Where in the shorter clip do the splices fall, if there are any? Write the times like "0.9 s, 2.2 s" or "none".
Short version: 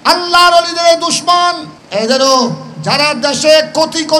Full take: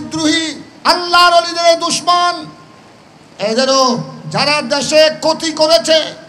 1.7 s